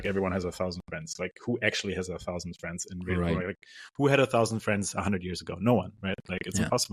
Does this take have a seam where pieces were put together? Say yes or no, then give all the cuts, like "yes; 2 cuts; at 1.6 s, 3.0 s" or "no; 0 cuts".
no; 0 cuts